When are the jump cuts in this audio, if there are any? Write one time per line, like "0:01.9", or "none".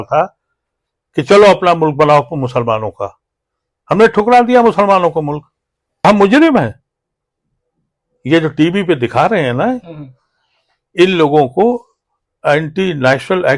0:06.0